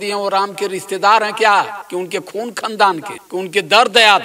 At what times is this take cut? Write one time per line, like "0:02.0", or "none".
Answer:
0:01.8
0:03.2